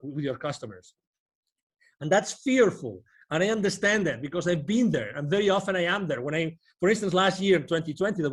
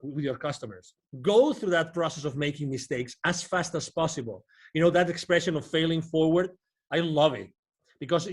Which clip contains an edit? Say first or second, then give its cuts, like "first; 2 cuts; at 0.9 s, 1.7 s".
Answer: second; 1 cut; at 1.1 s